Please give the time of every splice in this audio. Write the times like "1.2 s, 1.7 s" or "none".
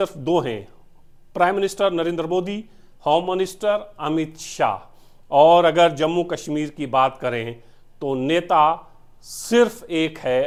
none